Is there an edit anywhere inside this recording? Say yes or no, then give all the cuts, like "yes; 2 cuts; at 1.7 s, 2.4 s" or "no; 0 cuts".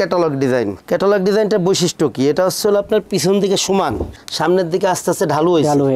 no; 0 cuts